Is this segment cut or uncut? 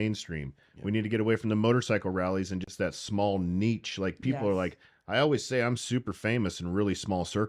uncut